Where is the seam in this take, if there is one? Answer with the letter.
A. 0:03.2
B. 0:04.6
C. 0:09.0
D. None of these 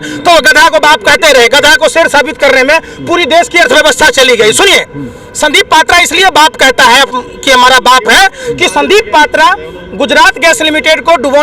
D